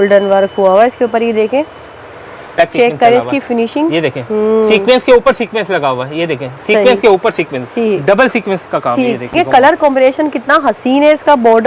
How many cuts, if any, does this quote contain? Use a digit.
2